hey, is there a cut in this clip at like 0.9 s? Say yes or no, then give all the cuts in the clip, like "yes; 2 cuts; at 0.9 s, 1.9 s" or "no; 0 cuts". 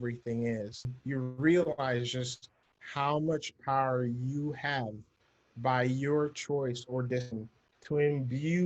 yes; 1 cut; at 0.9 s